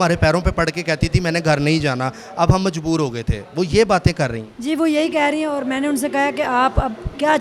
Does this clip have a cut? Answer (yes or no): no